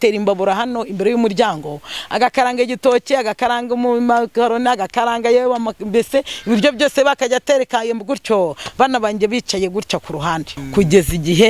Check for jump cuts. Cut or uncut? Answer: cut